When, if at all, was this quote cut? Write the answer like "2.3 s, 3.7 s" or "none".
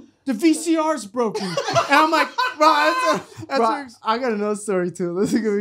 3.6 s